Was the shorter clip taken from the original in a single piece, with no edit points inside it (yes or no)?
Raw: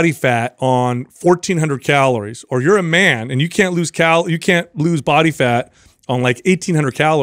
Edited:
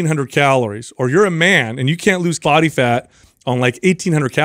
no